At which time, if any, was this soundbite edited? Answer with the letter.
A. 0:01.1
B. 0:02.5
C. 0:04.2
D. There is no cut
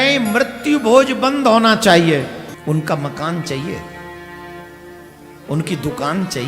B